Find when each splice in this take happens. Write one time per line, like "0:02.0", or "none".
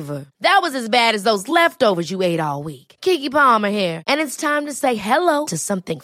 none